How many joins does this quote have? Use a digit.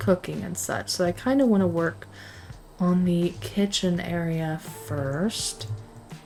0